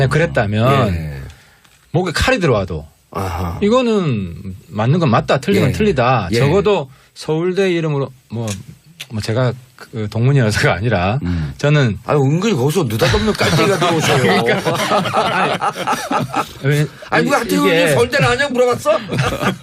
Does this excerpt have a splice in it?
yes; 1 cut; at 1.7 s

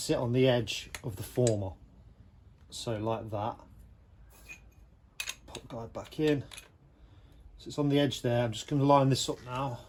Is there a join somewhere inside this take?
no; 0 cuts

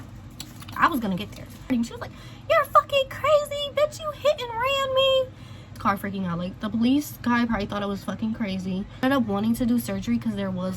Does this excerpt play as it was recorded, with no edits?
no; 3 cuts; at 1.7 s, 5.8 s, 9.0 s

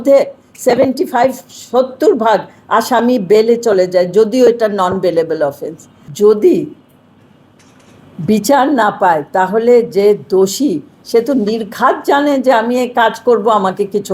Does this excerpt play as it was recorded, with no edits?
no; 1 cut; at 6.0 s

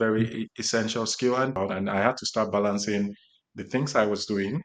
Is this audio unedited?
no; 1 cut; at 1.5 s

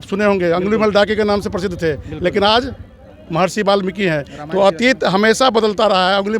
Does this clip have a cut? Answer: no; 0 cuts

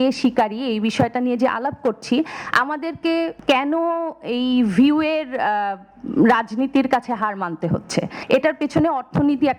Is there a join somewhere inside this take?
yes; 2 cuts; at 3.4 s, 8.2 s

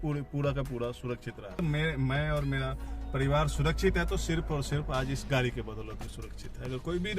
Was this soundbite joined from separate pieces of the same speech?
yes; 1 cut; at 1.6 s

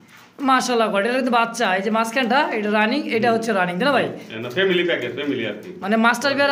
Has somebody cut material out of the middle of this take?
no; 0 cuts

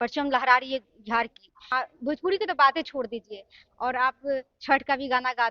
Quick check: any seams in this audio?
yes; 1 cut; at 1.7 s

